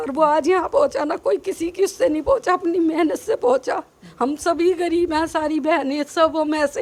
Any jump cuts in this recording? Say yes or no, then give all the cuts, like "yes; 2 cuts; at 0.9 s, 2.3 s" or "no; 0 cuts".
no; 0 cuts